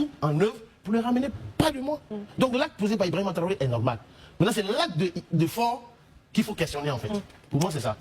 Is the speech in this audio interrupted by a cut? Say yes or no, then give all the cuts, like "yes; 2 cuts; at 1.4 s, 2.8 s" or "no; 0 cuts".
no; 0 cuts